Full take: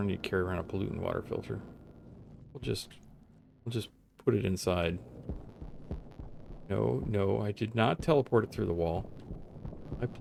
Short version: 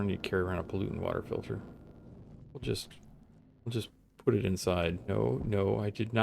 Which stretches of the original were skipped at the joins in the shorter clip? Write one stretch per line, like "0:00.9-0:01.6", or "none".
0:05.0-0:06.6